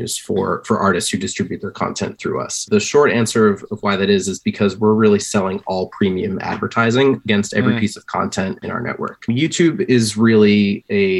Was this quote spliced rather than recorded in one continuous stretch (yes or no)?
yes